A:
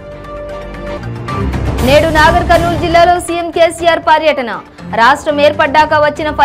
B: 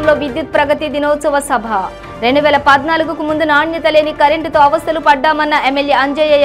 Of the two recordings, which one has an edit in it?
A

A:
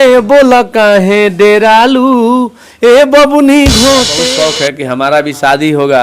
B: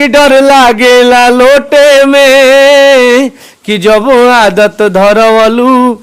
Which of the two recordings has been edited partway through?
A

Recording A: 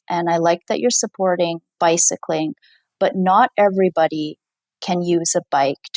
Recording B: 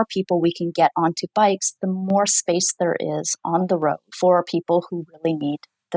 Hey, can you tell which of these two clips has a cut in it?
B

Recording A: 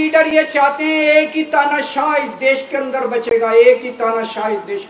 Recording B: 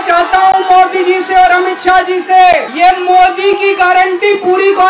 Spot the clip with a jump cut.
B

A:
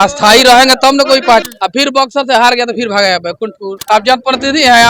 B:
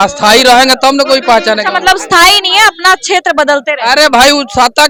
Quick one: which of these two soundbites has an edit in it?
A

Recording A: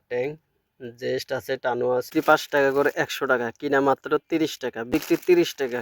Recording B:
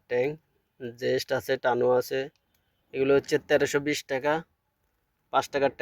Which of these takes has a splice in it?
A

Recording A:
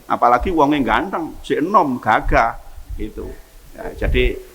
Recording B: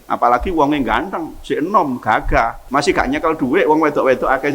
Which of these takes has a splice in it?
B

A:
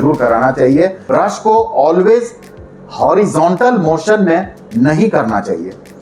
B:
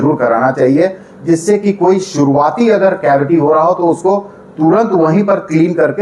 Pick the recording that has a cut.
A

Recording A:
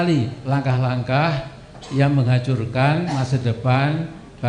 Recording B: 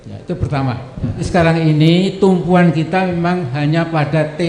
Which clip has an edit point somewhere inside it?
B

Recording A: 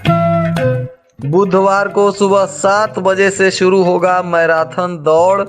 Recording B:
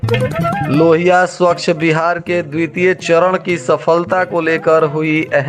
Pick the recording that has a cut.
A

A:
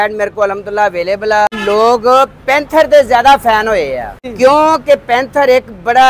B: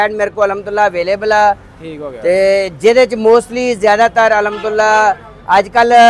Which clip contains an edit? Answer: A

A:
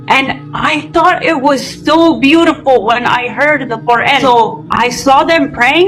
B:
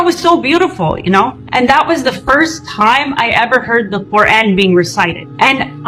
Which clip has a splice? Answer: A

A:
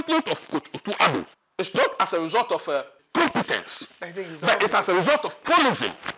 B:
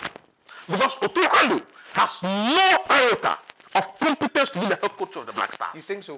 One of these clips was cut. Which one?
A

